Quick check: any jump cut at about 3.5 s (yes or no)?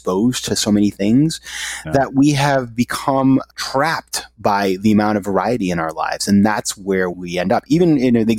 yes